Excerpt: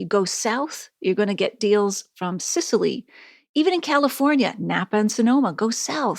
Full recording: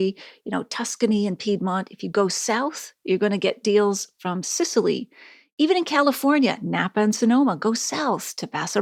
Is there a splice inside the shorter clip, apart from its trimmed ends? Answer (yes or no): no